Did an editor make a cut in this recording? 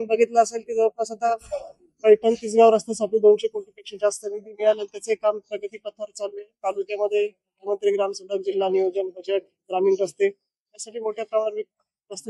no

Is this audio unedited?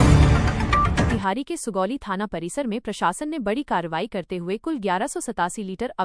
no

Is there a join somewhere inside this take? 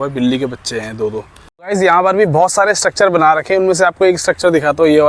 yes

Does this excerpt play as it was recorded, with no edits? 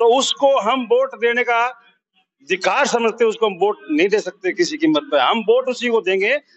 yes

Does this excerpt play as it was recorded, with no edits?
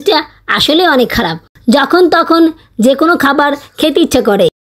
no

